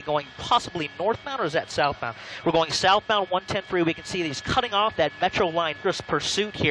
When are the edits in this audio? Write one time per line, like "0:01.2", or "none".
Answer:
none